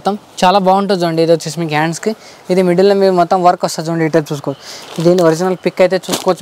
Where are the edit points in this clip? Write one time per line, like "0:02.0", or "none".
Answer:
none